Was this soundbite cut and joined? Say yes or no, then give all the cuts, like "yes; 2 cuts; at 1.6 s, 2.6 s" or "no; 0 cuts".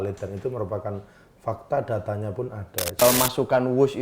yes; 1 cut; at 3.0 s